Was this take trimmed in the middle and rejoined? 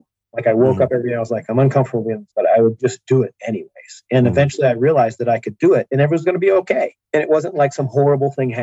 yes; 2 cuts; at 2.2 s, 7.0 s

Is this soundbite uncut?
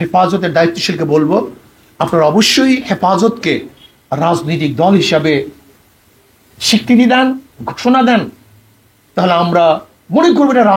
yes; 0 cuts

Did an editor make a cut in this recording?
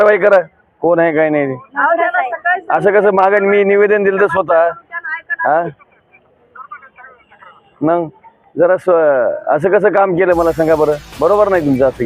no; 0 cuts

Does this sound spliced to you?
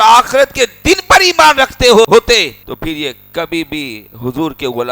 no; 0 cuts

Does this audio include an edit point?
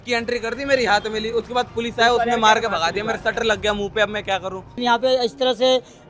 yes; 1 cut; at 4.8 s

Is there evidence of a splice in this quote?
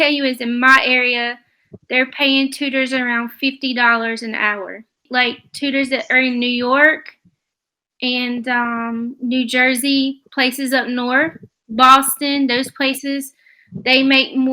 yes; 1 cut; at 5.0 s

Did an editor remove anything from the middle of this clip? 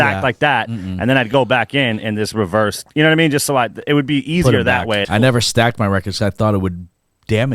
yes; 1 cut; at 5.1 s

